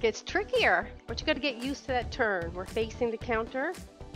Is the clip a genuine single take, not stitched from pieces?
yes; 0 cuts

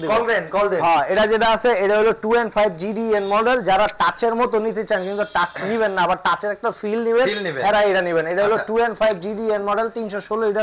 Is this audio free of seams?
yes; 0 cuts

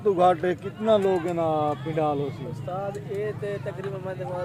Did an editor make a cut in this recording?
no; 0 cuts

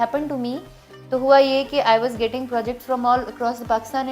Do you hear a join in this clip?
no; 0 cuts

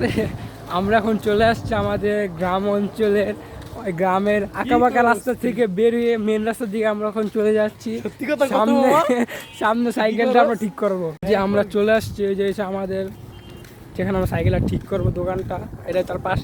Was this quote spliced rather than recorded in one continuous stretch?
yes; 1 cut; at 11.1 s

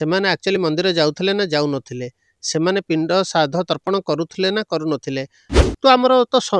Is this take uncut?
no; 1 cut; at 5.5 s

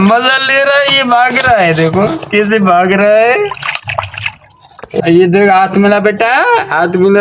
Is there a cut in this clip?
no; 0 cuts

